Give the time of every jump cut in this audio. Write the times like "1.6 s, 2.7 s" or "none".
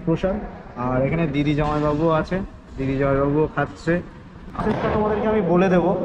4.4 s